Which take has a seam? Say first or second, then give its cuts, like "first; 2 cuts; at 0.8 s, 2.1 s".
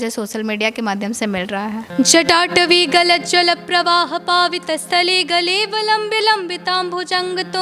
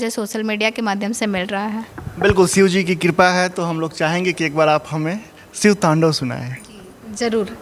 first; 1 cut; at 1.9 s